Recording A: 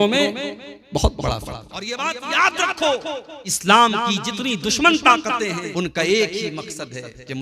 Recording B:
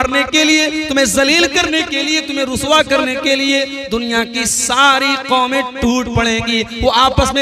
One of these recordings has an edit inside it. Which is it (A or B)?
A